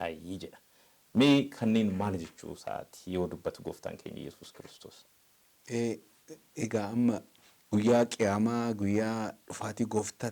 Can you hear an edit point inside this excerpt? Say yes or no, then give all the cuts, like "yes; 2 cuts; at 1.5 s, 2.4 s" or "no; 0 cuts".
no; 0 cuts